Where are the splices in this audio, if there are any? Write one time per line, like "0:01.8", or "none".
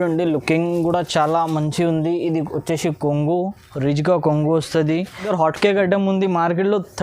0:05.3